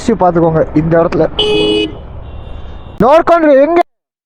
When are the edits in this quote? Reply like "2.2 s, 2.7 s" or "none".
3.0 s